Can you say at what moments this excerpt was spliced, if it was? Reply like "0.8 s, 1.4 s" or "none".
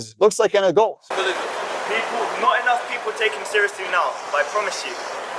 1.0 s